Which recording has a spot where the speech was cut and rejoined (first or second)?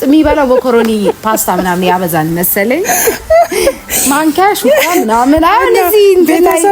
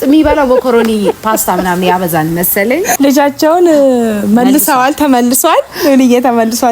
second